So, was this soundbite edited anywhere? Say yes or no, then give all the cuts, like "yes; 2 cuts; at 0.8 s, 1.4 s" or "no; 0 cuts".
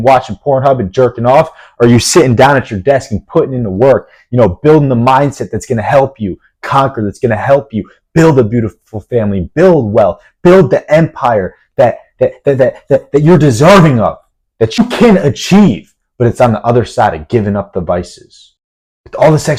no; 0 cuts